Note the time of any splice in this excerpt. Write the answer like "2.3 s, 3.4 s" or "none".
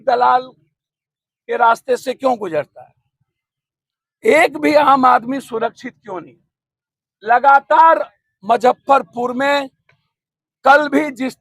none